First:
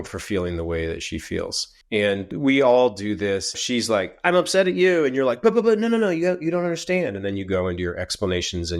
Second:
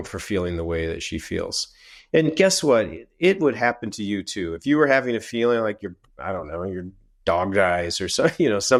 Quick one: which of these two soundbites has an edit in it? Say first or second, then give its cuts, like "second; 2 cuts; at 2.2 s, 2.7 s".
first; 2 cuts; at 2.1 s, 3.6 s